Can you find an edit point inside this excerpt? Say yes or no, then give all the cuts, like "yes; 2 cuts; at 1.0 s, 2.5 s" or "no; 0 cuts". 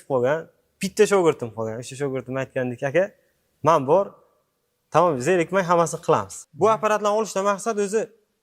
yes; 1 cut; at 6.4 s